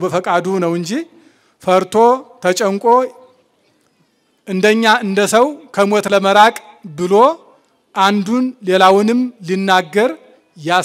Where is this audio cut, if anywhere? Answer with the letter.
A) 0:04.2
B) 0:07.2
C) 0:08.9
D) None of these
D